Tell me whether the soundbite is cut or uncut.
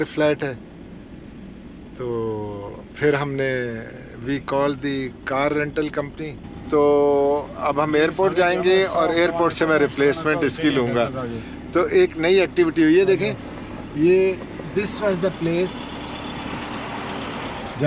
uncut